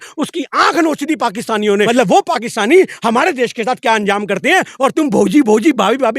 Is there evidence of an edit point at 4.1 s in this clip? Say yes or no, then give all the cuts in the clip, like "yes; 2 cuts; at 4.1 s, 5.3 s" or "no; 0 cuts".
no; 1 cut; at 1.9 s